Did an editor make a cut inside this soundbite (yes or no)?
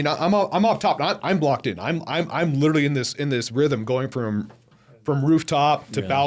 no